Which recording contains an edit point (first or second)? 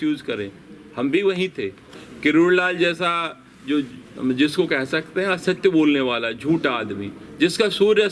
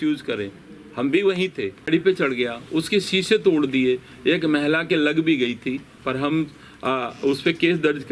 first